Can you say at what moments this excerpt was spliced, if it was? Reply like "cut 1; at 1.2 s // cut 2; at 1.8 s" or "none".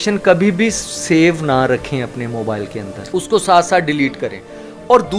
none

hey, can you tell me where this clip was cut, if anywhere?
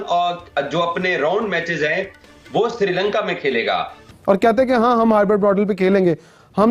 cut 1; at 4.0 s

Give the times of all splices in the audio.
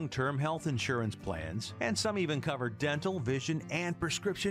none

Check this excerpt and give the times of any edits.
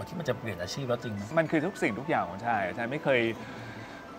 cut 1; at 1.3 s

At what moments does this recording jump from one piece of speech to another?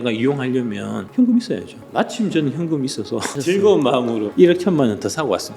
cut 1; at 1.0 s // cut 2; at 1.8 s // cut 3; at 3.3 s // cut 4; at 4.2 s

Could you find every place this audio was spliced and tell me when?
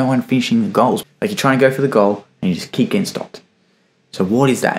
cut 1; at 1.0 s

